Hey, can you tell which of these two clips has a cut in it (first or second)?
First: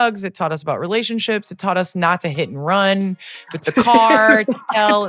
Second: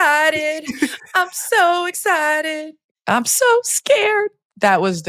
second